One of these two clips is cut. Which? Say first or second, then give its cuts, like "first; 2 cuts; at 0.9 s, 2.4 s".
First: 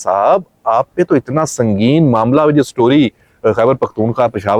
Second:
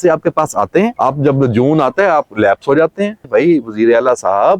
second; 2 cuts; at 0.9 s, 3.2 s